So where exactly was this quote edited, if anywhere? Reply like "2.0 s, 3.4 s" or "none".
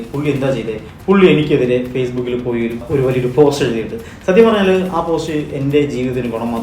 2.8 s

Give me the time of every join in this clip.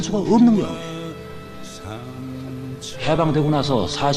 1.8 s

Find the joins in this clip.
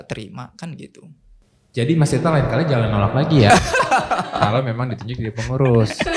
none

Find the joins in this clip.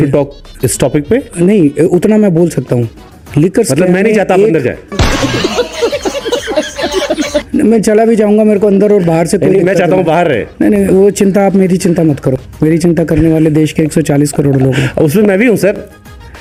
none

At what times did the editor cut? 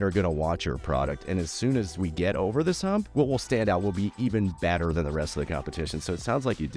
3.1 s

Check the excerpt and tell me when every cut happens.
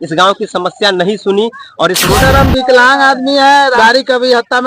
2.1 s, 3.8 s

